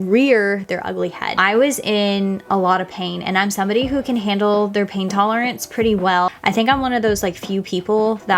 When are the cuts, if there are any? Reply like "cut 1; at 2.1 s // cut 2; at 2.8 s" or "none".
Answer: cut 1; at 1.3 s // cut 2; at 6.3 s